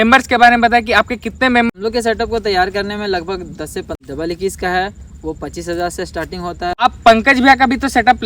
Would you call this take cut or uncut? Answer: cut